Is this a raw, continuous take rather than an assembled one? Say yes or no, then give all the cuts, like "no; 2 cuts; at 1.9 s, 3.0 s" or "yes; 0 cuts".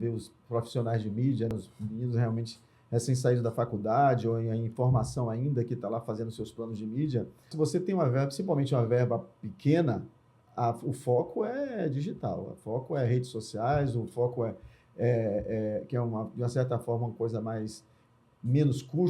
no; 2 cuts; at 1.5 s, 7.5 s